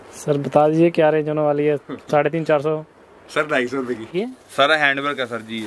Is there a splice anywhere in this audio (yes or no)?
yes